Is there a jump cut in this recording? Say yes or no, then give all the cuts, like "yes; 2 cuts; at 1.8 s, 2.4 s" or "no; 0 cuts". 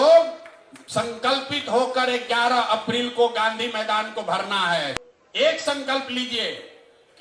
yes; 1 cut; at 5.0 s